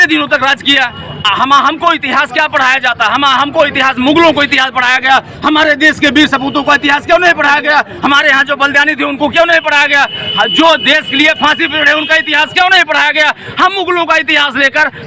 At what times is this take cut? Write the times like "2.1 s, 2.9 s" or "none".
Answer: none